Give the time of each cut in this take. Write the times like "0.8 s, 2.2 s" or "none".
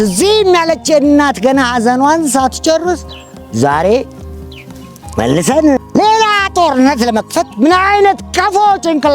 none